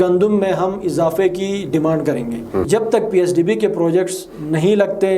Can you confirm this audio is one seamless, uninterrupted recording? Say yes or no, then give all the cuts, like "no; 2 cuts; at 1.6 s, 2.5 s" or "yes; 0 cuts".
no; 1 cut; at 2.7 s